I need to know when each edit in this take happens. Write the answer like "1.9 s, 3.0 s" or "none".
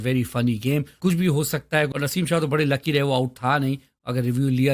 0.9 s, 1.9 s